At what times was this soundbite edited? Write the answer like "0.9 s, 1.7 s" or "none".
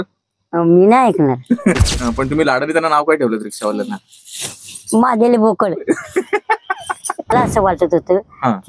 1.8 s, 7.3 s